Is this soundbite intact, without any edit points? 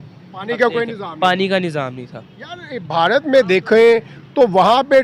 yes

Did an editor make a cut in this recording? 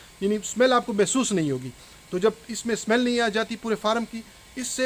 no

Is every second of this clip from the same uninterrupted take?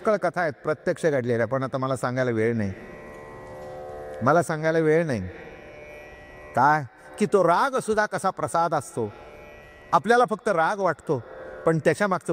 yes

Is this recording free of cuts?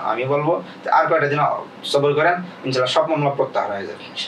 yes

